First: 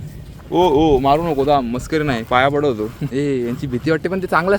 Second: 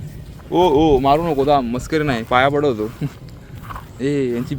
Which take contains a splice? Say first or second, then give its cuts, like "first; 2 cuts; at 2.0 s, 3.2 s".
first; 1 cut; at 3.0 s